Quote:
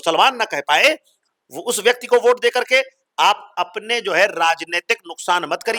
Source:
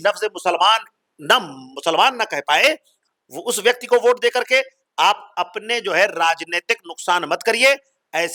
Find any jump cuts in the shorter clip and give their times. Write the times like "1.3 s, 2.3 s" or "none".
none